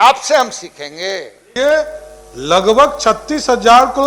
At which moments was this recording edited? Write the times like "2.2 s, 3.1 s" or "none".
1.5 s